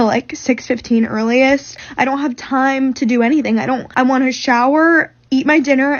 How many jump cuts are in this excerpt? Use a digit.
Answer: 2